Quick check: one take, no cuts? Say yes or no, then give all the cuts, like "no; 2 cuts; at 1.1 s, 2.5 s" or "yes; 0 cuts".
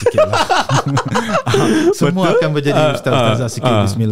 yes; 0 cuts